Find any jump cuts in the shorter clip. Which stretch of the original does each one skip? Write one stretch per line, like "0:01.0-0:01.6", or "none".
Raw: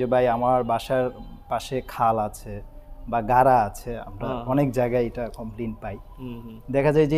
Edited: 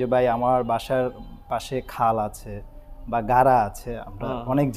none